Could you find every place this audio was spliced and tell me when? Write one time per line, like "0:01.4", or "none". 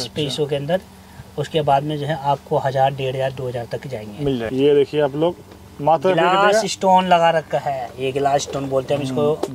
0:04.5